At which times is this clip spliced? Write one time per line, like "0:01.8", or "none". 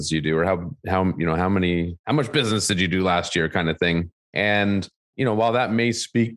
0:05.0